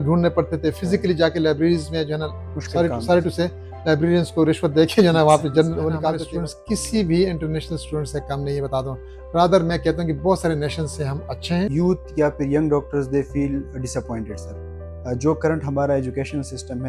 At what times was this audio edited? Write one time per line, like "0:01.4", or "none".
0:06.2
0:11.7